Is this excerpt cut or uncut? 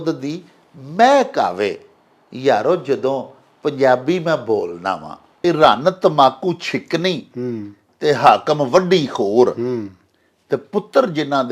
cut